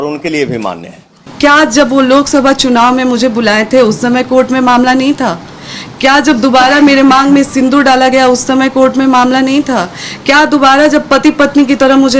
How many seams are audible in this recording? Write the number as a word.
one